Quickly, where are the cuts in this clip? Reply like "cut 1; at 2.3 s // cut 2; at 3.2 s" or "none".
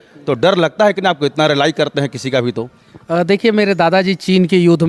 none